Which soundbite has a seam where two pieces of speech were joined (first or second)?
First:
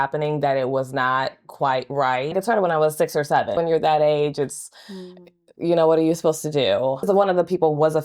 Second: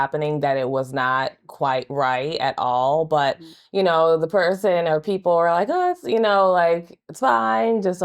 first